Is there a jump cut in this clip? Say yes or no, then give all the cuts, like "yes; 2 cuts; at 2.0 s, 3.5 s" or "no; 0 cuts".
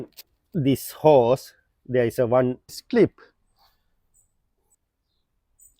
yes; 1 cut; at 2.8 s